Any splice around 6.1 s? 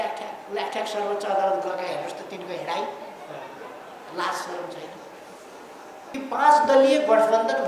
yes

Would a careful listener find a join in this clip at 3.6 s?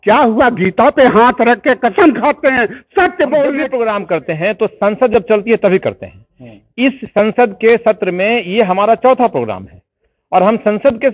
yes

